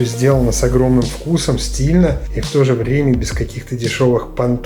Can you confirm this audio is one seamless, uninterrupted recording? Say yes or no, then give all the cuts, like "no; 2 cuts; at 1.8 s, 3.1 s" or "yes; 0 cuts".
no; 1 cut; at 2.3 s